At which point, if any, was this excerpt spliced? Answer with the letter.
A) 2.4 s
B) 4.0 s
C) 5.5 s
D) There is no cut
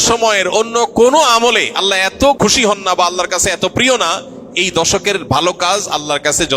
A